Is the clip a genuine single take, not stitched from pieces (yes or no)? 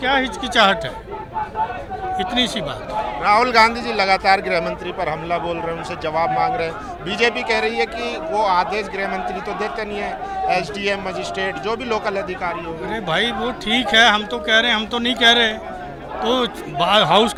yes